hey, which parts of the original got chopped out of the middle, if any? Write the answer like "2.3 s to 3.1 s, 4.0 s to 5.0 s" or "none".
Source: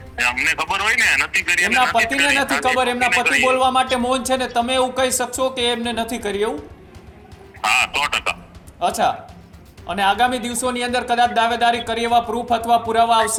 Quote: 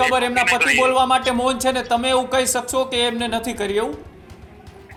none